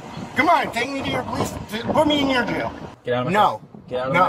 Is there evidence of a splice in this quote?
yes; 1 cut; at 2.9 s

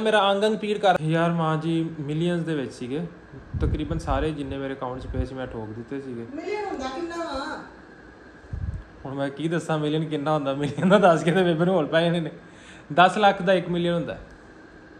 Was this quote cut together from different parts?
yes; 1 cut; at 1.0 s

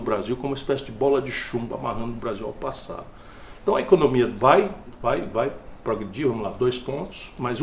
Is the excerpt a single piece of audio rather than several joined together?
yes; 0 cuts

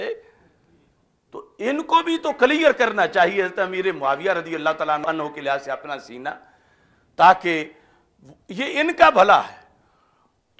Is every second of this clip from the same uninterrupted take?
yes; 0 cuts

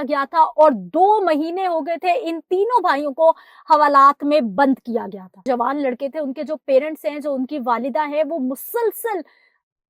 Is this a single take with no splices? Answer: yes; 0 cuts

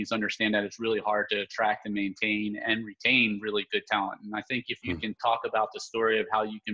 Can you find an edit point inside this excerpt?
no; 0 cuts

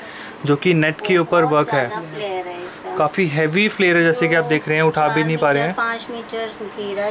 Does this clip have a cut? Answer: no; 0 cuts

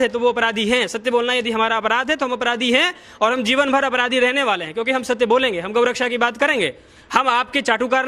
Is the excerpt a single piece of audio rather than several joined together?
yes; 0 cuts

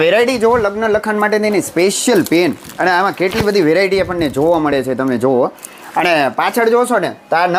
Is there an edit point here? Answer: no; 0 cuts

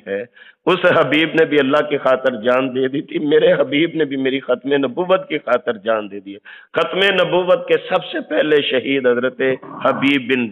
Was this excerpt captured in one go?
yes; 0 cuts

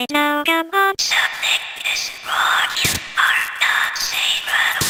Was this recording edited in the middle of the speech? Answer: no; 0 cuts

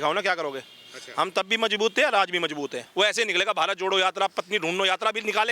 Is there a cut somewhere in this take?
yes; 1 cut; at 2.8 s

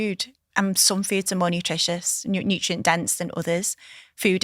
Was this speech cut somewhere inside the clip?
no; 0 cuts

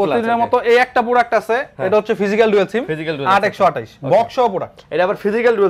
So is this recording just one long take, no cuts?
yes; 0 cuts

